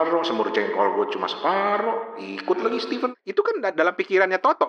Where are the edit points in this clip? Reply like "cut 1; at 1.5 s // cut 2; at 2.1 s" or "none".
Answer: cut 1; at 3.1 s

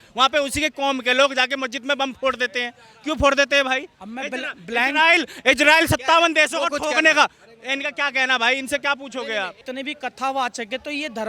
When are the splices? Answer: cut 1; at 9.6 s

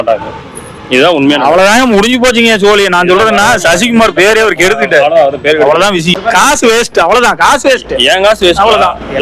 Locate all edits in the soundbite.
cut 1; at 6.2 s

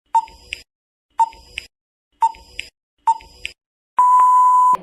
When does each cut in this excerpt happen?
none

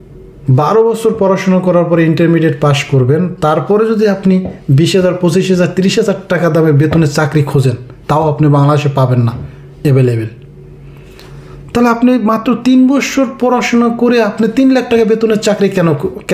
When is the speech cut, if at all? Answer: none

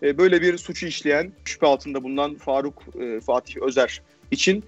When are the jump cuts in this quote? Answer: cut 1; at 1.5 s

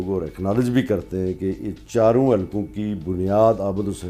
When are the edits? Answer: none

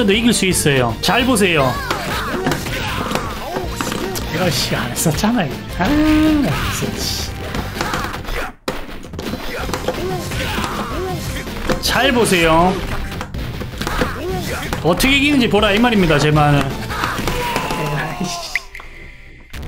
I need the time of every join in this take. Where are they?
cut 1; at 1.0 s

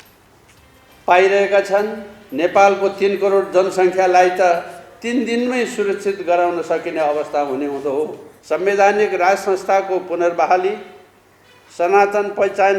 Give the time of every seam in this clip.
cut 1; at 8.3 s

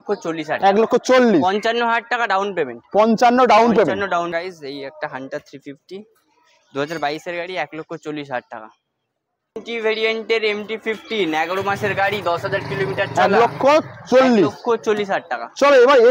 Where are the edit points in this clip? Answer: cut 1; at 4.4 s // cut 2; at 9.6 s

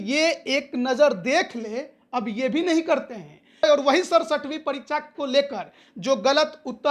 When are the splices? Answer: cut 1; at 3.6 s

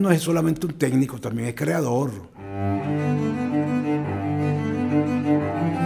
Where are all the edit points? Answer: cut 1; at 2.3 s

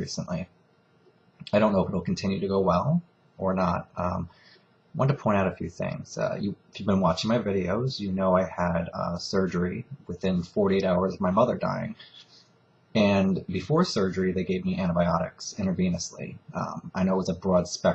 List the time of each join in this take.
none

